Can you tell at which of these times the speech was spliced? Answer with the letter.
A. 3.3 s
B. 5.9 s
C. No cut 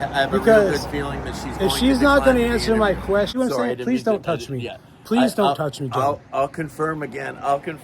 A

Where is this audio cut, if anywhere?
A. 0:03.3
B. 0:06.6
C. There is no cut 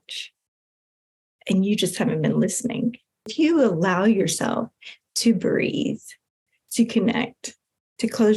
A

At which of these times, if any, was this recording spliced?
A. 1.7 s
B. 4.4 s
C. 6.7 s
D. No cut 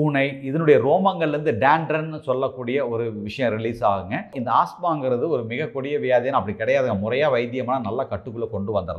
B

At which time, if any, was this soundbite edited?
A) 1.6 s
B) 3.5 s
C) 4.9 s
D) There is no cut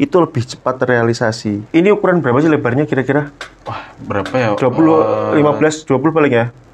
A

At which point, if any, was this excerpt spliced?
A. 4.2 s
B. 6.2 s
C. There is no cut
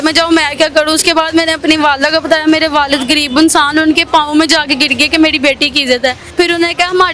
B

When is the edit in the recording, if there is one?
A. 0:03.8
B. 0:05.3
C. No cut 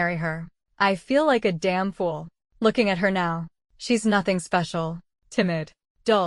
B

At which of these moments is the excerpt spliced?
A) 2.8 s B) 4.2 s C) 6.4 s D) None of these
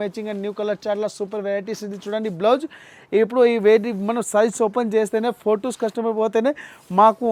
D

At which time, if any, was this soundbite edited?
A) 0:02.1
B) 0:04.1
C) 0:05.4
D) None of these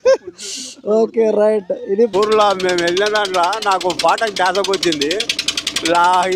A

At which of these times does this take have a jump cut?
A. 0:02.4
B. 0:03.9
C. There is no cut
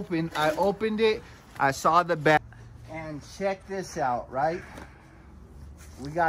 A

